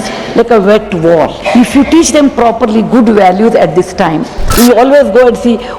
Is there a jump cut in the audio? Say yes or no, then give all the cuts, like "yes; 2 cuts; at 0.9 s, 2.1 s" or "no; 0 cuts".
yes; 2 cuts; at 1.4 s, 4.4 s